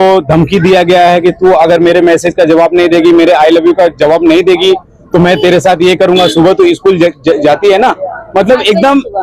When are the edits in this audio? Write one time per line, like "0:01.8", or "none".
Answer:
none